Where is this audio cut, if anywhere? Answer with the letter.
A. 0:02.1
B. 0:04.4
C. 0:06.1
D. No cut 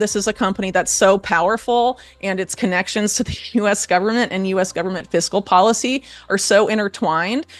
D